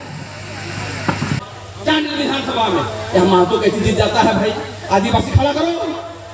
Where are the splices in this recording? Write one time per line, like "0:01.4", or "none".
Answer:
0:01.3